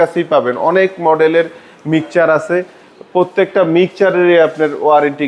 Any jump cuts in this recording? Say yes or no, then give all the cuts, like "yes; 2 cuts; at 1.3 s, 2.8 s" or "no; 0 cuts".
no; 0 cuts